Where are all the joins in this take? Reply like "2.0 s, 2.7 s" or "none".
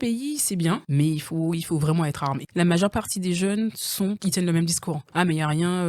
0.9 s, 2.4 s, 4.2 s, 5.0 s